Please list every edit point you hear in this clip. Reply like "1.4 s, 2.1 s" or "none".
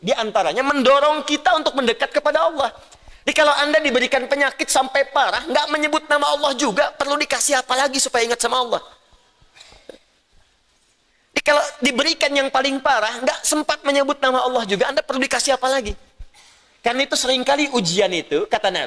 none